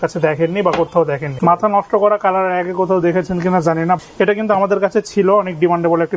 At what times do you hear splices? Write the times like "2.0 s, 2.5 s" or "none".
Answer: 1.3 s, 4.0 s